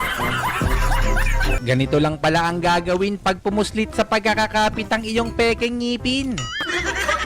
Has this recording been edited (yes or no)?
yes